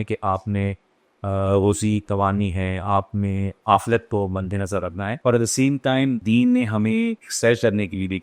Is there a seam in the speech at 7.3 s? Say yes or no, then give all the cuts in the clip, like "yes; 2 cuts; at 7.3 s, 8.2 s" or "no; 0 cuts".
yes; 3 cuts; at 5.1 s, 6.2 s, 7.3 s